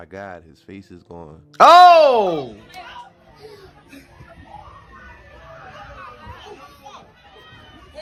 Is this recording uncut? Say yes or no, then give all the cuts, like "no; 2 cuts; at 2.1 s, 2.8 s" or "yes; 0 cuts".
yes; 0 cuts